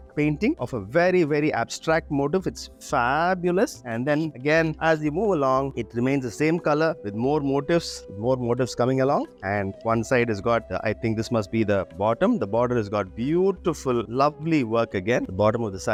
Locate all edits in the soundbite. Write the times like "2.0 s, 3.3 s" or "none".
none